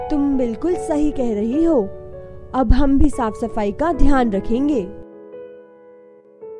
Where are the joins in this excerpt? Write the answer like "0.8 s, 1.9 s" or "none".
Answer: 4.9 s